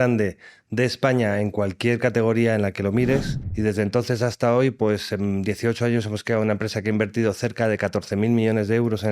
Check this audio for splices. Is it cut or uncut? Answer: cut